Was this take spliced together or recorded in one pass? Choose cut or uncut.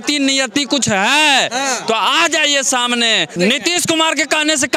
cut